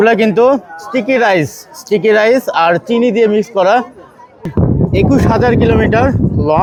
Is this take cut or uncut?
uncut